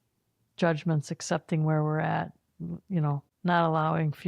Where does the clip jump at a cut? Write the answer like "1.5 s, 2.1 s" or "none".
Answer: 3.3 s